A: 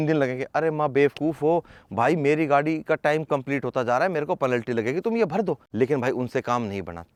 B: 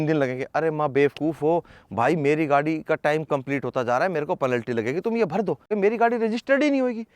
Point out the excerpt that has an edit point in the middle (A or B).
B